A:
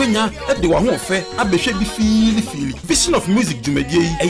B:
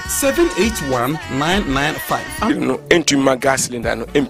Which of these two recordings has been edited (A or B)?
B